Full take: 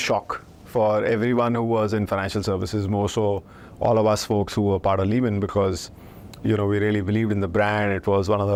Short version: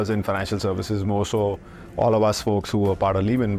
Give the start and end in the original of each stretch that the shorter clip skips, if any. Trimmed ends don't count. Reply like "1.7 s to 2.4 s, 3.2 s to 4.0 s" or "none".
none